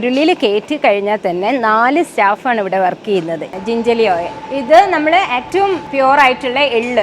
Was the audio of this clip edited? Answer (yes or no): yes